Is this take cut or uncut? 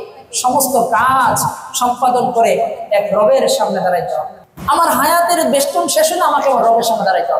uncut